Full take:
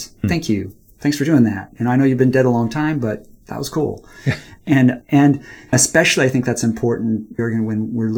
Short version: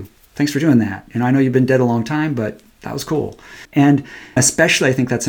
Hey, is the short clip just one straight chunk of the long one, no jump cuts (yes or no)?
no